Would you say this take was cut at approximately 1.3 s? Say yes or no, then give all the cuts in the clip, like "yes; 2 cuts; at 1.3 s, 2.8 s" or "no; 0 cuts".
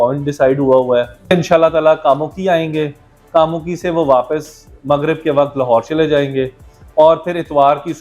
yes; 1 cut; at 1.3 s